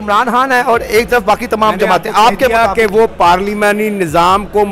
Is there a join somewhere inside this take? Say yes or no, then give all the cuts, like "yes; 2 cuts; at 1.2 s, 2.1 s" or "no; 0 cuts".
no; 0 cuts